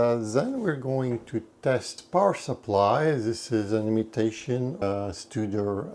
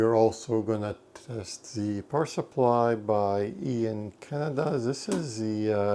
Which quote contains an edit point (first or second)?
first